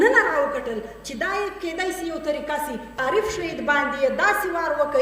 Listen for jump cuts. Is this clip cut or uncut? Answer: cut